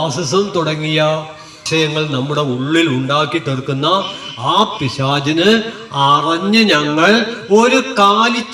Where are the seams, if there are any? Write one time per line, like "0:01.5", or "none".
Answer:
none